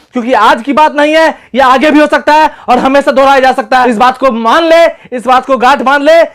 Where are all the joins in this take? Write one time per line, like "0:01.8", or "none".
0:03.8